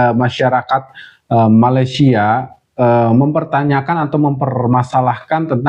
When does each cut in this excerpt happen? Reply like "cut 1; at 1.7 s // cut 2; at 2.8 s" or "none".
none

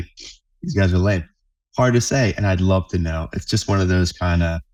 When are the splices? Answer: none

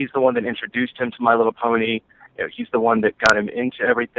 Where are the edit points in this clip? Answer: cut 1; at 1.0 s

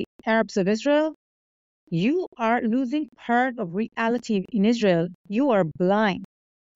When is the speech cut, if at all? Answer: none

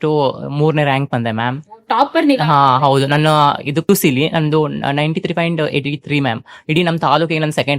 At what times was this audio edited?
cut 1; at 3.9 s

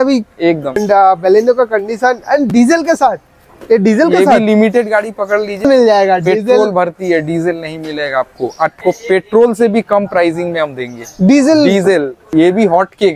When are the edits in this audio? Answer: cut 1; at 0.8 s // cut 2; at 5.6 s // cut 3; at 8.8 s // cut 4; at 12.2 s

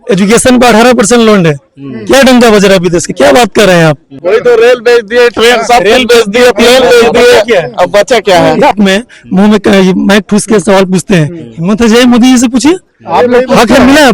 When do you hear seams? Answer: cut 1; at 4.1 s // cut 2; at 8.8 s

